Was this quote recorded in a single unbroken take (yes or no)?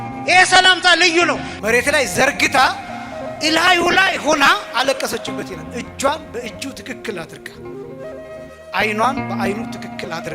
no